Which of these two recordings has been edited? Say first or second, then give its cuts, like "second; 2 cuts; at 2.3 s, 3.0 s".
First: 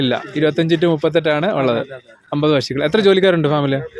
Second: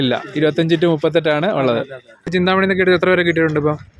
second; 1 cut; at 2.3 s